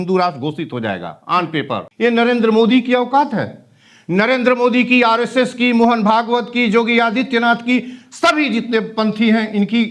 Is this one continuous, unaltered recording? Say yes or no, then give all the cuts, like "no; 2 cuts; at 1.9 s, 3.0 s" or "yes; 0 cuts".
no; 1 cut; at 1.9 s